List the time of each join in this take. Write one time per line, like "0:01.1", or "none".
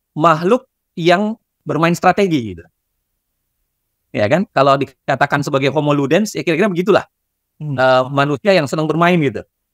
0:01.6